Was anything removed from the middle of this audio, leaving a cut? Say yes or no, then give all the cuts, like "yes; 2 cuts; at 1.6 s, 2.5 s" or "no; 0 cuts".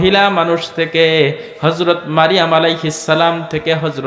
no; 0 cuts